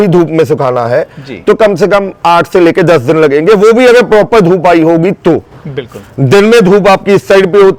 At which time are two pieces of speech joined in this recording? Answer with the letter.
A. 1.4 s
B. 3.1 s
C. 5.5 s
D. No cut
D